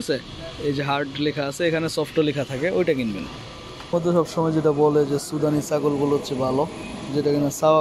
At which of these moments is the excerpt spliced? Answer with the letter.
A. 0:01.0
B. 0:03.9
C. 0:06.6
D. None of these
B